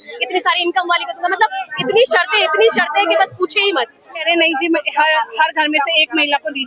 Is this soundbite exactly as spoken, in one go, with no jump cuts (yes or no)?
no